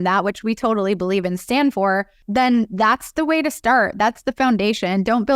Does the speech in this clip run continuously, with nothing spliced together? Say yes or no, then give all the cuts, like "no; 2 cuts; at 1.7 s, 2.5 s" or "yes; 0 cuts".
no; 1 cut; at 2.2 s